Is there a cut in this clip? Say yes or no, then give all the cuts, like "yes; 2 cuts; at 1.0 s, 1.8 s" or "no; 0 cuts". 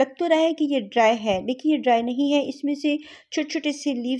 no; 0 cuts